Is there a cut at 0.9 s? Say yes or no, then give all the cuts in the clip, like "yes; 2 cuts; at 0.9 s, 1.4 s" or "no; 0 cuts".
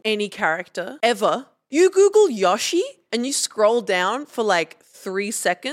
yes; 3 cuts; at 0.9 s, 1.6 s, 3.0 s